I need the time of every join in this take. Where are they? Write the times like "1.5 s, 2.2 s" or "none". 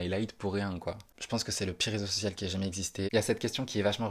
1.2 s, 3.1 s